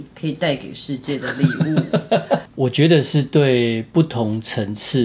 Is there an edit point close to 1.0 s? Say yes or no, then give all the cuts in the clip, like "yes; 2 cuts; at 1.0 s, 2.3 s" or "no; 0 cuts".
no; 2 cuts; at 2.5 s, 3.9 s